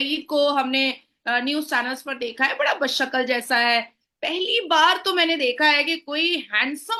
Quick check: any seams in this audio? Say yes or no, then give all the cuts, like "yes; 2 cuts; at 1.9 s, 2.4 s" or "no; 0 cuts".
no; 0 cuts